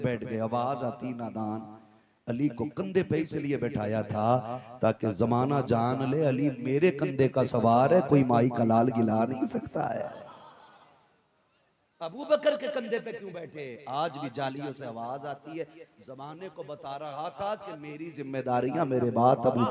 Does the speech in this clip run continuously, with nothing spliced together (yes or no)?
yes